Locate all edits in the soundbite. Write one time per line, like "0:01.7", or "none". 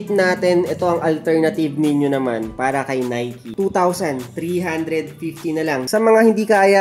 0:03.5
0:05.9